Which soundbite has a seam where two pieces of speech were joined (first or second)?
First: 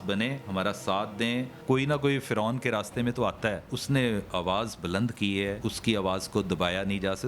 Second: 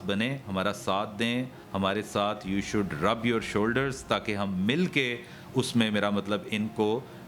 first